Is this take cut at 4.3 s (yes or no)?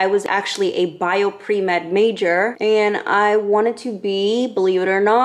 no